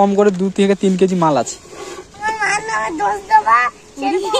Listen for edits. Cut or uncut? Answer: cut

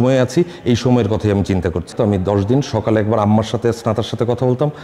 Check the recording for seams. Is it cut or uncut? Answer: cut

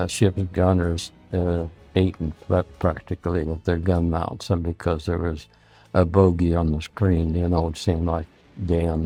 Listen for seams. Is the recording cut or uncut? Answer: uncut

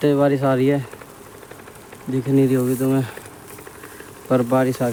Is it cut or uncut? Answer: uncut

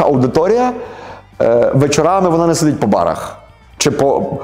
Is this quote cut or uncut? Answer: uncut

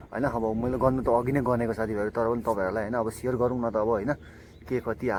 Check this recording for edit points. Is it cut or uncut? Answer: uncut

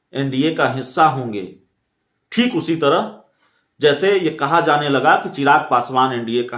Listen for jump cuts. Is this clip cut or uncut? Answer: uncut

